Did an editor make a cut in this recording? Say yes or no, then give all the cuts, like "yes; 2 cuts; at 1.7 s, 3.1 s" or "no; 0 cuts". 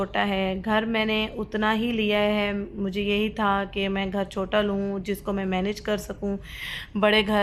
no; 0 cuts